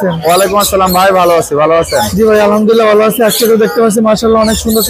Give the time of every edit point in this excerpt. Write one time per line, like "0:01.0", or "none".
none